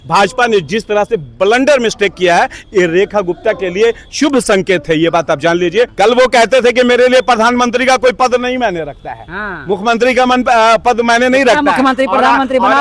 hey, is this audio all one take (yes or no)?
no